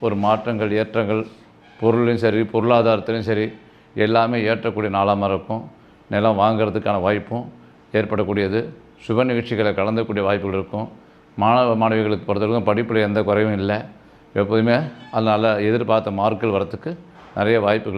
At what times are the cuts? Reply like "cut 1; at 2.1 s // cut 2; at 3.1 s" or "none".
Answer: none